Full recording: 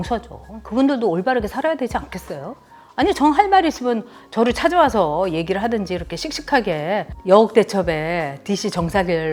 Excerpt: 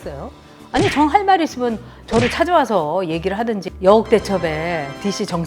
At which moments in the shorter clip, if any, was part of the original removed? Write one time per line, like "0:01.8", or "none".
0:03.7